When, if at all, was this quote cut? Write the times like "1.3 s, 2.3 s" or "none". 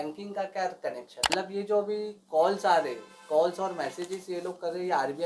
1.2 s